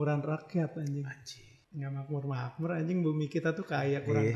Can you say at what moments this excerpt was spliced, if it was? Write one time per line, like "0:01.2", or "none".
none